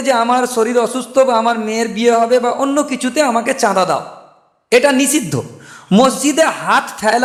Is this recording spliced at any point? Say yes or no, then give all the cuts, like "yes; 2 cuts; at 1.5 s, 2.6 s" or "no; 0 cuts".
no; 0 cuts